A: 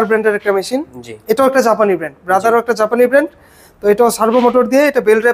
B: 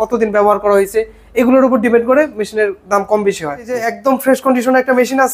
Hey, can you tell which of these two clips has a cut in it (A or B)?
B